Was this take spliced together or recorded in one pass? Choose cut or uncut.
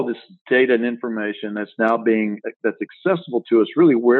uncut